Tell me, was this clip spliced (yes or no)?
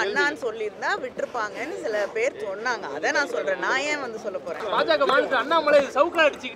yes